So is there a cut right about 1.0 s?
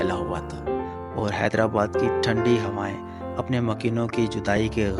no; 0 cuts

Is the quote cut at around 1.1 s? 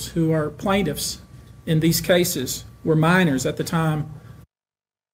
no; 0 cuts

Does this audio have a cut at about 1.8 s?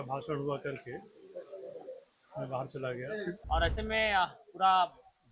no; 1 cut; at 3.4 s

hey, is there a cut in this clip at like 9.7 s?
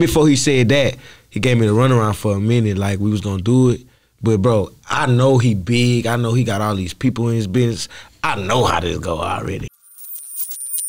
yes; 1 cut; at 9.7 s

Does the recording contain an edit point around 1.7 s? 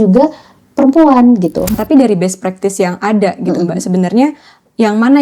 yes; 1 cut; at 1.7 s

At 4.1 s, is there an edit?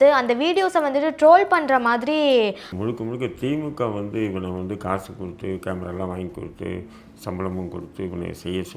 no; 1 cut; at 2.6 s

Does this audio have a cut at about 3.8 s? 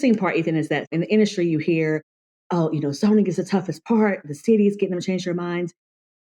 no; 1 cut; at 0.9 s

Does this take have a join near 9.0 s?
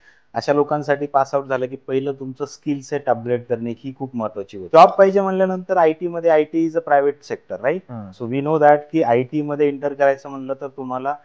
no; 1 cut; at 4.7 s

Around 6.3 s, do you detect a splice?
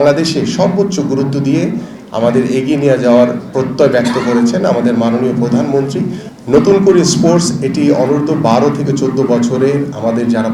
yes; 1 cut; at 6.3 s

